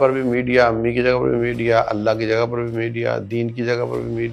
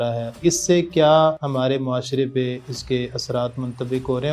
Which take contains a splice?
second; 1 cut; at 1.4 s

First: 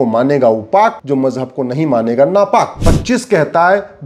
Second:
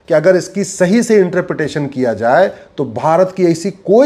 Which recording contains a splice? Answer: first; 2 cuts; at 1.0 s, 2.8 s

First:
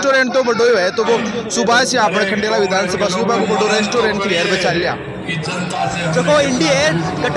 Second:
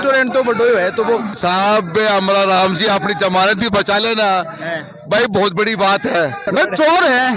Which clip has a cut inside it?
second; 2 cuts; at 1.4 s, 6.5 s

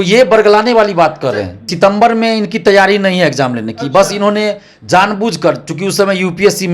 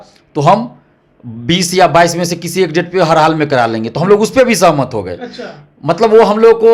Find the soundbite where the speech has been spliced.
first; 1 cut; at 1.7 s

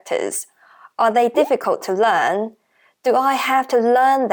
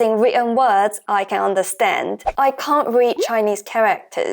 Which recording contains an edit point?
second; 1 cut; at 2.2 s

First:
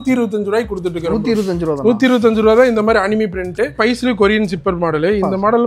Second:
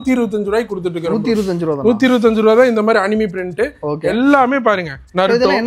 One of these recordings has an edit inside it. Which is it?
first; 1 cut; at 3.8 s

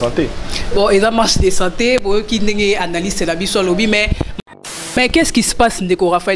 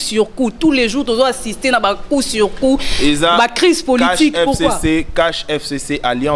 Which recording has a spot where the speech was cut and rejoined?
first; 1 cut; at 4.5 s

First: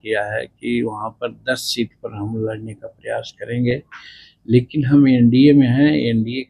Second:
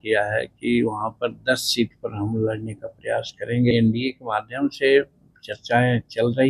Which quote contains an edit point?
second; 1 cut; at 3.7 s

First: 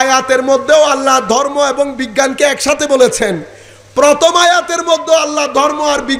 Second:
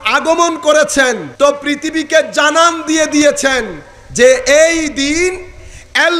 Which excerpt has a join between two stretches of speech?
second; 1 cut; at 1.3 s

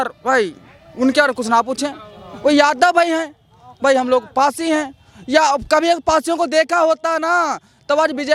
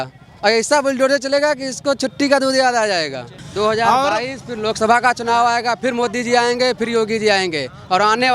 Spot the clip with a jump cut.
second; 1 cut; at 3.4 s

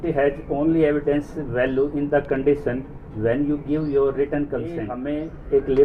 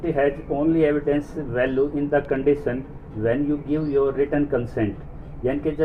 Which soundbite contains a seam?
first; 1 cut; at 4.9 s

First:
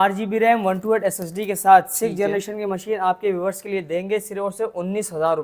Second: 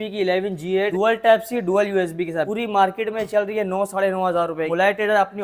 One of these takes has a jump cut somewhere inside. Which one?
second; 3 cuts; at 0.9 s, 2.5 s, 4.7 s

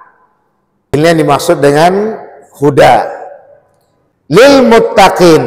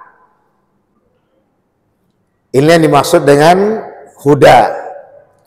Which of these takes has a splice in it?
first; 2 cuts; at 0.9 s, 4.4 s

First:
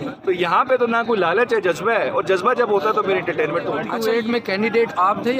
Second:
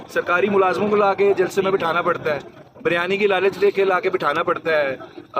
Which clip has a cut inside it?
first; 1 cut; at 3.9 s

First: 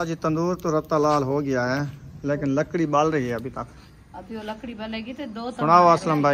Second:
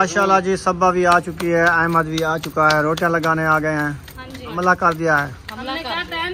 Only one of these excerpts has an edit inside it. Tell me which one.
second; 1 cut; at 4.5 s

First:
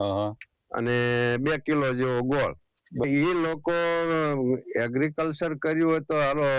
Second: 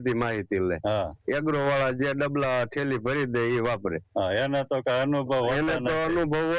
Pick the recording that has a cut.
first; 1 cut; at 3.0 s

